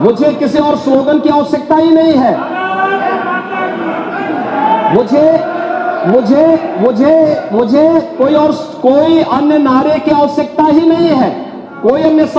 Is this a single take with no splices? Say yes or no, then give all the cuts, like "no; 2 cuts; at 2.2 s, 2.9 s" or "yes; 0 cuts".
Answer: yes; 0 cuts